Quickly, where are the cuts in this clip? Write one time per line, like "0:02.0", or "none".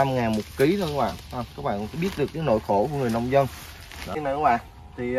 0:04.2